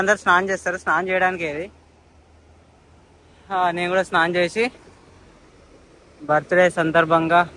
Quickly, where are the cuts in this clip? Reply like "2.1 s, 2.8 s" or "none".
none